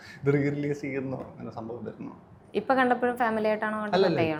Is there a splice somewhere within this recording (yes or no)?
no